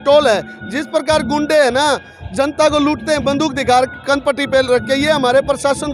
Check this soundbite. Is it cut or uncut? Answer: uncut